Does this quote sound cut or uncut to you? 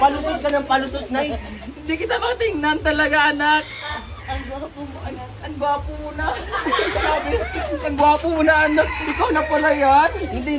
uncut